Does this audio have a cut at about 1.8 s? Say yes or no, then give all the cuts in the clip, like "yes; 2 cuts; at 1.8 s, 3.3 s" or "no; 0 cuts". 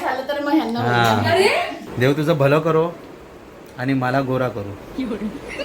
yes; 1 cut; at 1.8 s